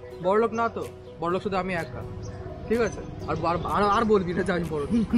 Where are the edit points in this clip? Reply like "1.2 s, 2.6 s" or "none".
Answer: none